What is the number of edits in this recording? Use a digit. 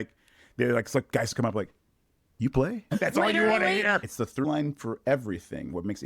2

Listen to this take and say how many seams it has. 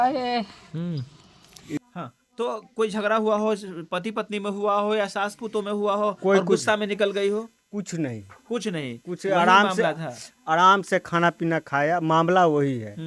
1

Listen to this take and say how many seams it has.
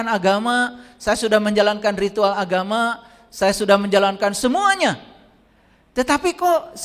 0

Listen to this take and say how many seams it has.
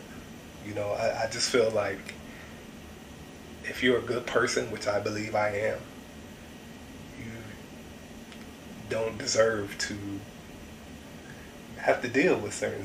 0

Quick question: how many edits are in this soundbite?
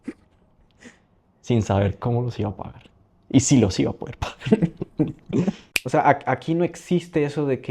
1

